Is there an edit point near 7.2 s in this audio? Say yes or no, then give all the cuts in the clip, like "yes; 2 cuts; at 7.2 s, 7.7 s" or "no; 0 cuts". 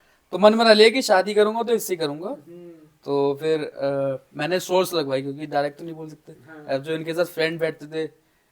no; 0 cuts